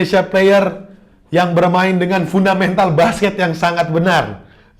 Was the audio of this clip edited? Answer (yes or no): no